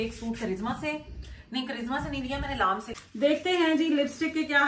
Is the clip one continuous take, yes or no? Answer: no